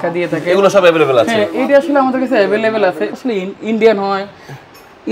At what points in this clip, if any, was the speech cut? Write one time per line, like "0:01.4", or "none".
0:03.2